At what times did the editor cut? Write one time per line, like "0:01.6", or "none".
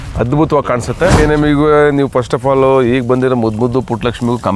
0:01.2